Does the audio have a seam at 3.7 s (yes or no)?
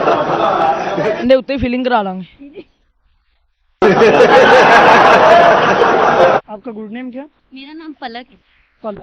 no